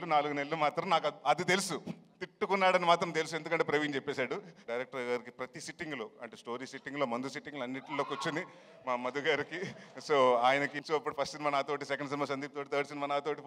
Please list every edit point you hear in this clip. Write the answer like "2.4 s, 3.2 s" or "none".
4.6 s, 10.8 s